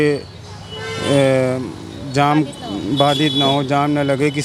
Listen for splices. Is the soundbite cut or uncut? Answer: uncut